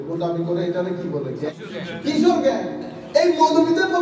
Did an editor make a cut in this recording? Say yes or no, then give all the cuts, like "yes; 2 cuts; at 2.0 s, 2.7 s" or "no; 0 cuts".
yes; 1 cut; at 1.5 s